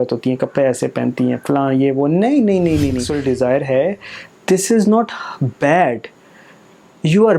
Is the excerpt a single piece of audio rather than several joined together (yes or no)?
no